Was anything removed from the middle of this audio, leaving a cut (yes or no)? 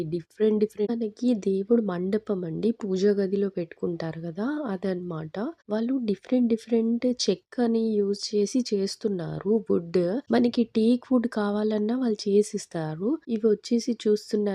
yes